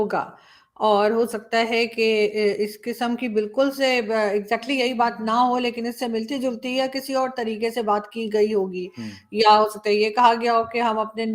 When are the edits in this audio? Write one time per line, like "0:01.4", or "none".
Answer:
none